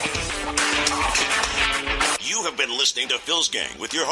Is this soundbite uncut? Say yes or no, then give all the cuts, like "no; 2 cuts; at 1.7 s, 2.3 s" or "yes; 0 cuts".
yes; 0 cuts